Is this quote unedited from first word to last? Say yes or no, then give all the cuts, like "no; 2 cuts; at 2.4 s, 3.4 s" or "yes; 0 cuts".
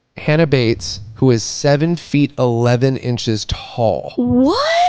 yes; 0 cuts